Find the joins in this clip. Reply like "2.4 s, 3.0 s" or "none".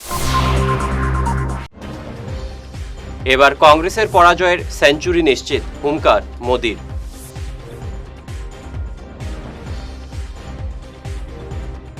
1.6 s